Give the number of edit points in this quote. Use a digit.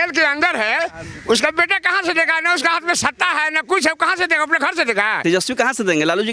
1